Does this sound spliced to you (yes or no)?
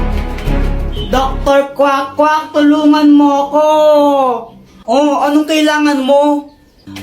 yes